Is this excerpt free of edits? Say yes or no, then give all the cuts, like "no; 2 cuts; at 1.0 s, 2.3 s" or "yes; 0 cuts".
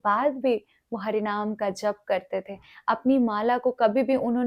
yes; 0 cuts